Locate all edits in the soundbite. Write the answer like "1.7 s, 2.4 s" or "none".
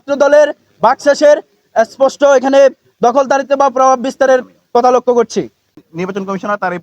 5.8 s